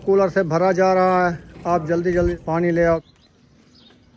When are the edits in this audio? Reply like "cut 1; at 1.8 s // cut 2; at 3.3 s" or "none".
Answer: cut 1; at 2.4 s // cut 2; at 3.0 s